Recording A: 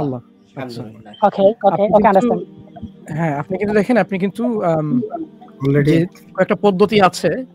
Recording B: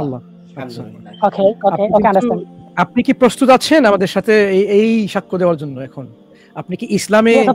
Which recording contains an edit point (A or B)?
B